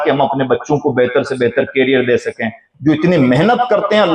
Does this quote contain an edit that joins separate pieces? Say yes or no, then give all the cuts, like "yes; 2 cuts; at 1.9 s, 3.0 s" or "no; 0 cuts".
yes; 1 cut; at 2.7 s